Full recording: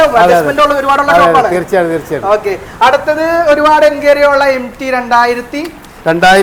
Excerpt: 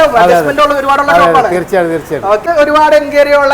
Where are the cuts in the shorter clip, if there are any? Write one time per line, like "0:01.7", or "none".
0:02.4